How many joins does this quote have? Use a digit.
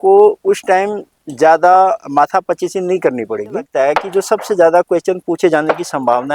1